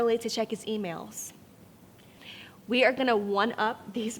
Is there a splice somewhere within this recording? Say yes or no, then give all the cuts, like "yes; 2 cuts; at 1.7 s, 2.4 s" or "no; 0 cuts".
yes; 1 cut; at 2.2 s